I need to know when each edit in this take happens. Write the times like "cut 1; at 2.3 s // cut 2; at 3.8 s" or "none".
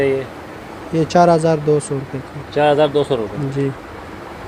none